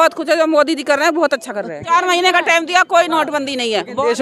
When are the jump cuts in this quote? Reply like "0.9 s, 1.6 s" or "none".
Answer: 1.8 s